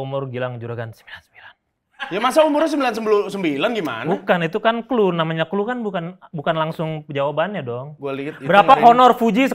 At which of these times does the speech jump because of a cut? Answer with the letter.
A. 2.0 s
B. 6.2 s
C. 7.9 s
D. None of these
C